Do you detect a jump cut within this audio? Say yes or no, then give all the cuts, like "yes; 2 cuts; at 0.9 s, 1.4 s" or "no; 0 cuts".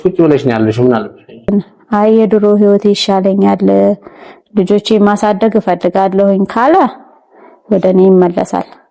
yes; 1 cut; at 1.4 s